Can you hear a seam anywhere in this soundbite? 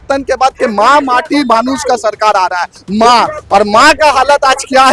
yes; 1 cut; at 2.8 s

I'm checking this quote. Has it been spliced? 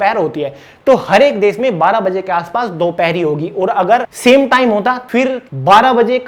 yes; 2 cuts; at 4.1 s, 5.1 s

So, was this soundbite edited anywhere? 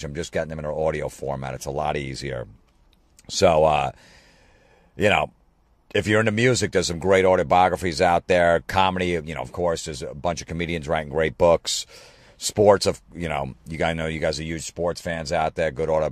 yes; 1 cut; at 13.1 s

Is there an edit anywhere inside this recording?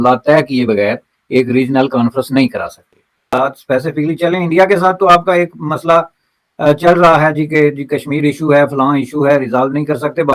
no; 0 cuts

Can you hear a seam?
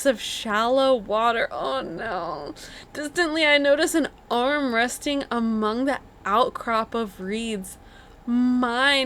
no; 0 cuts

